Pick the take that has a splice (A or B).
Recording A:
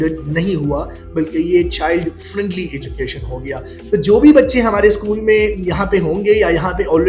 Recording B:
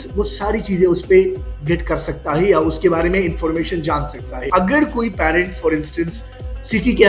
B